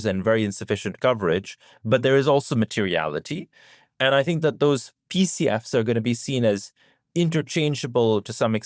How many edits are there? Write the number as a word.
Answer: zero